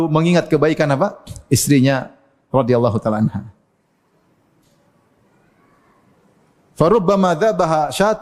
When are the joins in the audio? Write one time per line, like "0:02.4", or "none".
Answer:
none

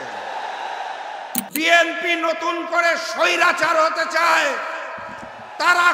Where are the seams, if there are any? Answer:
0:01.4

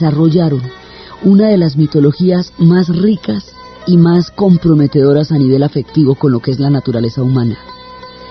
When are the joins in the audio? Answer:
0:04.6

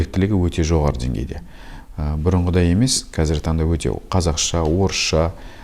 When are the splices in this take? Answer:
none

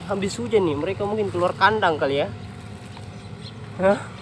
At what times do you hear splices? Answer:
none

